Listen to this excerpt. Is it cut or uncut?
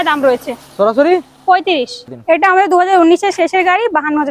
cut